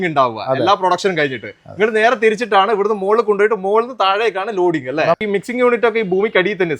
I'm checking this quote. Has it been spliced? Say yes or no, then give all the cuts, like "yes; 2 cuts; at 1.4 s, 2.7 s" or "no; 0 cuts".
yes; 1 cut; at 5.2 s